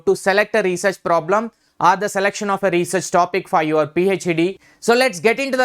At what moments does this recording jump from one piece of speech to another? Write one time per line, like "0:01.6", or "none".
0:04.7